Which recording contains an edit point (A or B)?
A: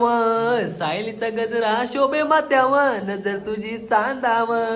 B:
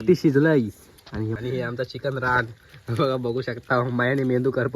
B